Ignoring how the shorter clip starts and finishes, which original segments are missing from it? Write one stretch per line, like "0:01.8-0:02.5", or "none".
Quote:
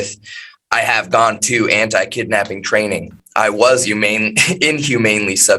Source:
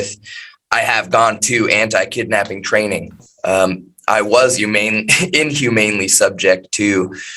0:03.2-0:03.9